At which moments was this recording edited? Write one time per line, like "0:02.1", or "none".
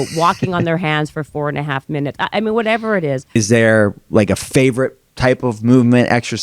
0:03.4